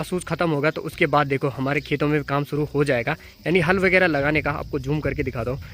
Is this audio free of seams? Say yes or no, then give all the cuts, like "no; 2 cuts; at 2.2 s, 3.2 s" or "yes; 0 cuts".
yes; 0 cuts